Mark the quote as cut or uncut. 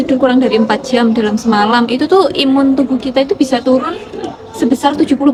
uncut